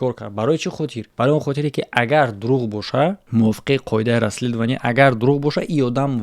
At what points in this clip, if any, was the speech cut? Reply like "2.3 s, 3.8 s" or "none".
1.0 s, 3.2 s